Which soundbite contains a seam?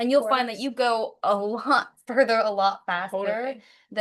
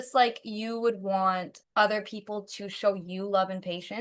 second; 1 cut; at 1.6 s

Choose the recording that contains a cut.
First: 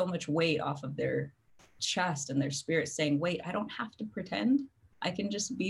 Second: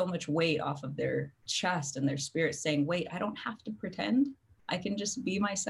second; 1 cut; at 1.4 s

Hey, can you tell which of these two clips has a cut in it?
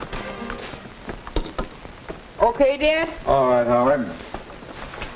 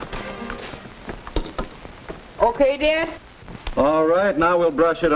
first; 1 cut; at 3.1 s

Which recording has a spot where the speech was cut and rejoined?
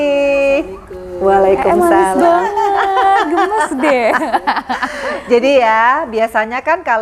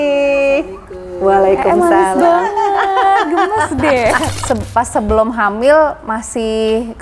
second; 1 cut; at 4.3 s

